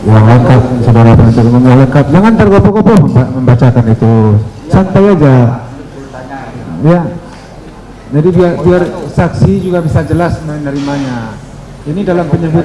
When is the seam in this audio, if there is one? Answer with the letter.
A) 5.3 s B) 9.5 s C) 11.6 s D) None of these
D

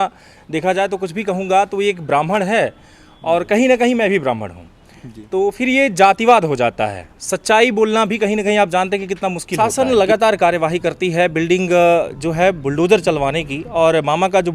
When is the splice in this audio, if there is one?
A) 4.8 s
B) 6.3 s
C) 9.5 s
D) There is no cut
C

